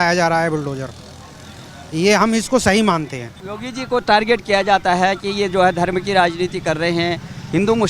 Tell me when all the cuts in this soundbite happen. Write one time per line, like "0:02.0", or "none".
none